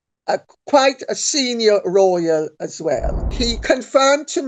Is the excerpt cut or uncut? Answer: cut